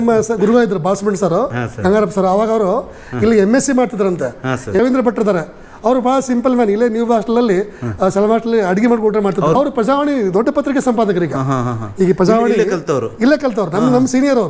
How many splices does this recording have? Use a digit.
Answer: 2